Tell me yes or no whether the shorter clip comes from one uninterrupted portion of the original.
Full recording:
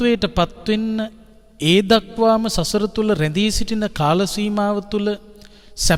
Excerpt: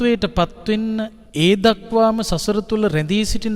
no